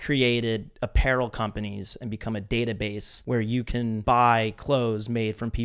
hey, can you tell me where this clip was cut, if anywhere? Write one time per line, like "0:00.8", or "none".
0:03.1
0:04.0